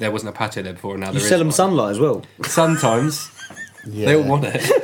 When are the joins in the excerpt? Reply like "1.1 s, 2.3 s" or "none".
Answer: none